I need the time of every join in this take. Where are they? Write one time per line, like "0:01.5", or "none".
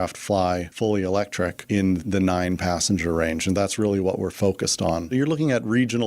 0:05.1